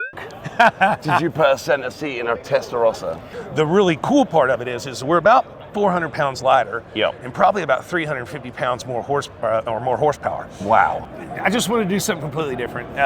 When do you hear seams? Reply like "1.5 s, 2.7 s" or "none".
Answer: 3.3 s, 11.0 s